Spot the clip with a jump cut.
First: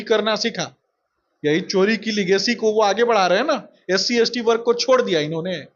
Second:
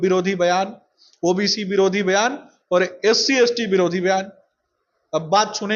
first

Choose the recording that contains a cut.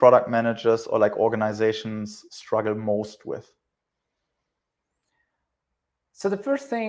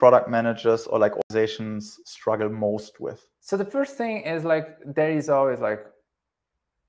second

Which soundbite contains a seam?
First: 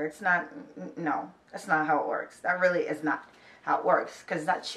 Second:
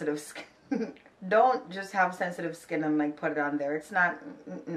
second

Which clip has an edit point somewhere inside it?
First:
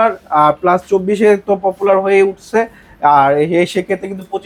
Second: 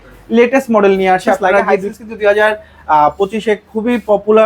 second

